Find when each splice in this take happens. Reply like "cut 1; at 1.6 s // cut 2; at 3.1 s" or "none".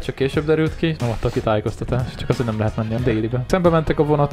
cut 1; at 1.0 s // cut 2; at 2.1 s // cut 3; at 3.0 s